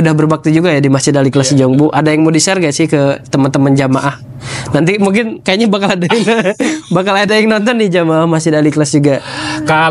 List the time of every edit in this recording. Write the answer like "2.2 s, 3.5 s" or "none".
none